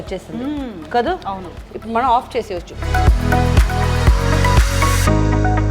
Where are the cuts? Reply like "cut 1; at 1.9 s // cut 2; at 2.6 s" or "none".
cut 1; at 2.8 s